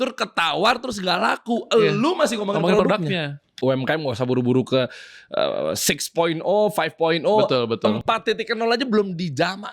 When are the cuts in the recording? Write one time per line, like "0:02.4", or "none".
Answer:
0:03.5

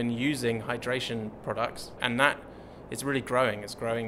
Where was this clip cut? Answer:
0:02.0

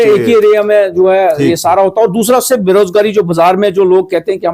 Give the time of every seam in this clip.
none

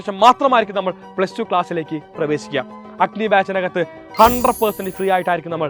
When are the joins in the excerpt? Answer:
0:02.8

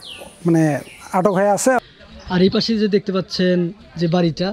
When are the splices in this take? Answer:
0:01.8

